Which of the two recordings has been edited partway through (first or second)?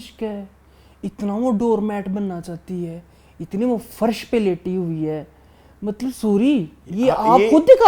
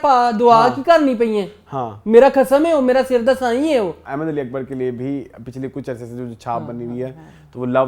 second